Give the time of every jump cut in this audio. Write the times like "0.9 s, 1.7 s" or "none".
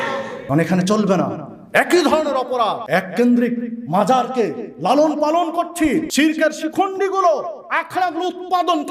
6.1 s